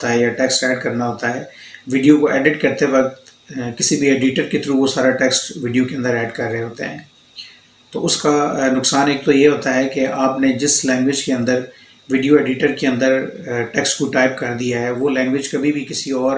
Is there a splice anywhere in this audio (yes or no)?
no